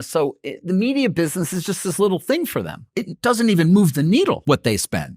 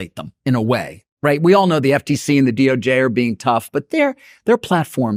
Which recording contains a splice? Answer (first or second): first